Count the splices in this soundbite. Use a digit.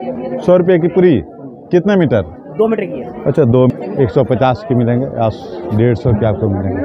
1